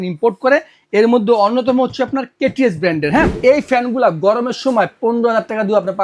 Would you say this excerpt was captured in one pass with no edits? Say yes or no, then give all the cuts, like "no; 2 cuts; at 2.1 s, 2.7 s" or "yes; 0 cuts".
no; 1 cut; at 3.3 s